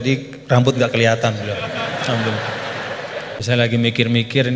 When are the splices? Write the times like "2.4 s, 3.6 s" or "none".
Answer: 3.4 s

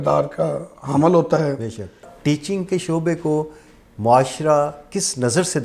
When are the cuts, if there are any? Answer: 2.1 s

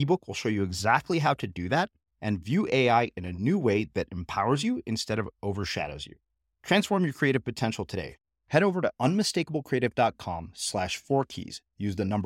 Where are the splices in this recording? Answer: none

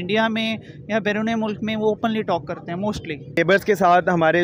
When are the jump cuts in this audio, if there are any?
3.4 s

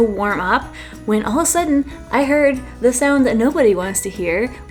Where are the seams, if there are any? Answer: none

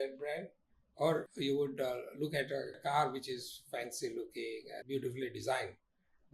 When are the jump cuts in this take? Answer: 1.3 s, 2.8 s, 4.8 s

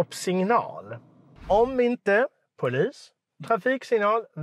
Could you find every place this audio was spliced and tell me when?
1.5 s

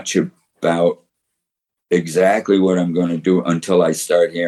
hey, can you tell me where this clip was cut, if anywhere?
none

